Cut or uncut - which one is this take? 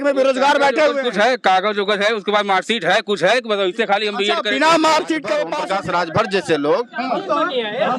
cut